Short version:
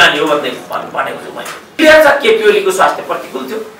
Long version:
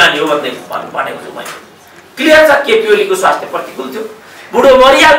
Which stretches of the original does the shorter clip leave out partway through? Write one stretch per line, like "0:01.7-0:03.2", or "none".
0:01.8-0:02.2